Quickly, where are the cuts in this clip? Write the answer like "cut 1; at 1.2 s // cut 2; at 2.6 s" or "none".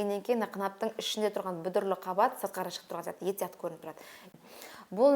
cut 1; at 4.3 s